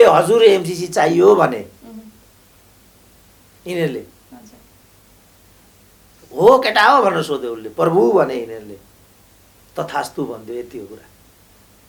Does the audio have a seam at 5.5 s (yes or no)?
no